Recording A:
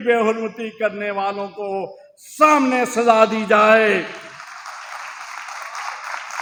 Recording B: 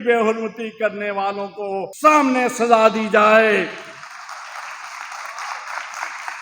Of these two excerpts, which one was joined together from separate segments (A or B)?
B